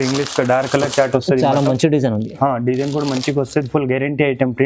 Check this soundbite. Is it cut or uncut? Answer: uncut